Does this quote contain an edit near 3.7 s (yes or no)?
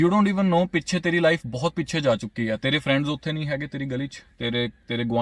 no